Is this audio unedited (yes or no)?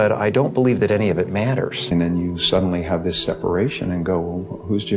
no